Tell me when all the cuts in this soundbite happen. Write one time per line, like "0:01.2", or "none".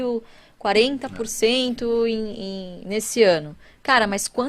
none